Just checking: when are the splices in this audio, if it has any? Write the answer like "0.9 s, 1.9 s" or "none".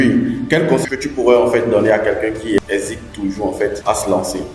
0.8 s, 2.6 s, 3.8 s